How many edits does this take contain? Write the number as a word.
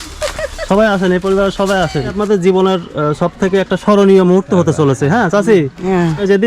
one